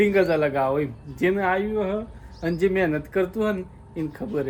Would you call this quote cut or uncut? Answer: uncut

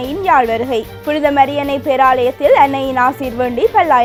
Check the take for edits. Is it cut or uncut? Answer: uncut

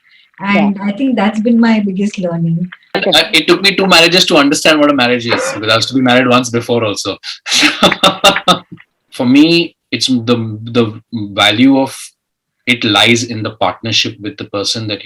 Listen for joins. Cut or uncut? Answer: cut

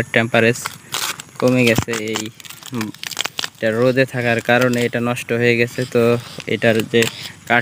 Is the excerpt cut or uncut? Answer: uncut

